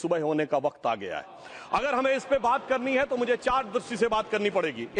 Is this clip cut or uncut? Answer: uncut